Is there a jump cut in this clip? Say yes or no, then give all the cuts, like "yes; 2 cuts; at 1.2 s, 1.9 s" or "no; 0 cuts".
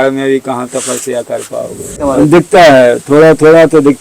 yes; 1 cut; at 2.0 s